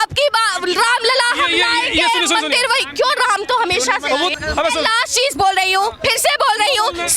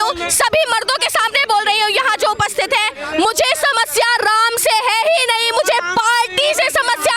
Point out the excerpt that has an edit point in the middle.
first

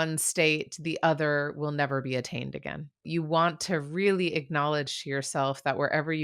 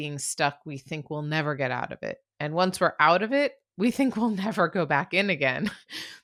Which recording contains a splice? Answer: first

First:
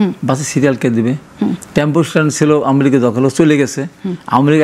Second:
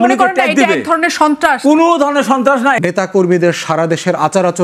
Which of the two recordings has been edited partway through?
second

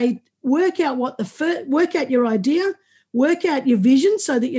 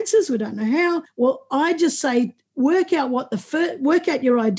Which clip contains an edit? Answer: second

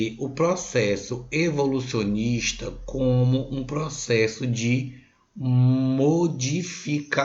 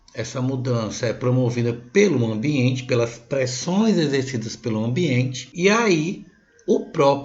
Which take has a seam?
second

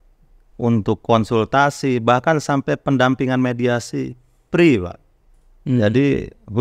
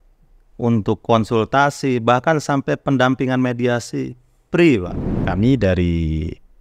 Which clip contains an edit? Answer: second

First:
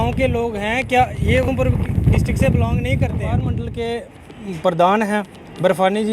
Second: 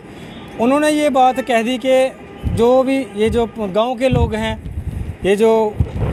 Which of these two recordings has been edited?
first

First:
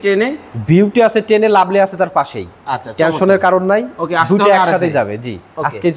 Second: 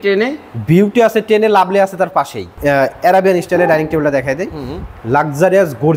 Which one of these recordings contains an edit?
second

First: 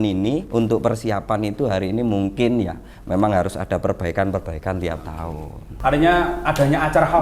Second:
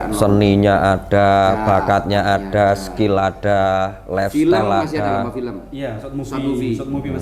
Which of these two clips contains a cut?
first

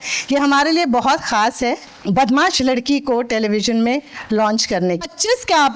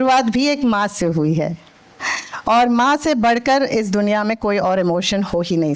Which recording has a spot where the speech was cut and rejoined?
first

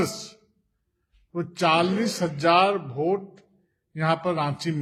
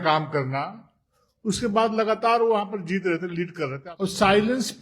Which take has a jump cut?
second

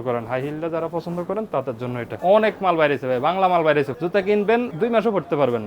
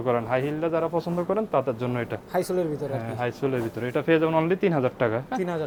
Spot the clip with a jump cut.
first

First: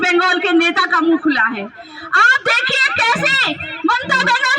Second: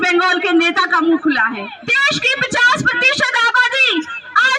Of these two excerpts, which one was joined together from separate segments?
second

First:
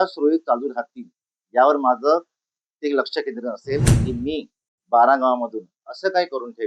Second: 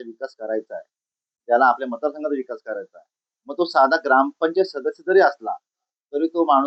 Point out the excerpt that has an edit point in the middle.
first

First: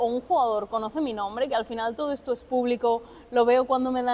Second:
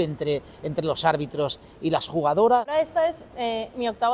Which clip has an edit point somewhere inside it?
second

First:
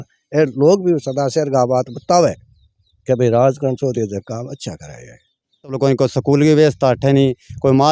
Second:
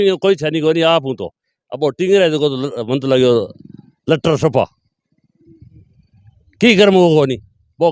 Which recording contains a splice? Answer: first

